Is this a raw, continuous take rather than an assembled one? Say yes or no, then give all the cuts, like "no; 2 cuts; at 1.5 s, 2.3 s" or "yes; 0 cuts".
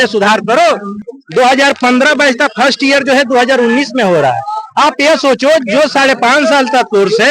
no; 1 cut; at 0.9 s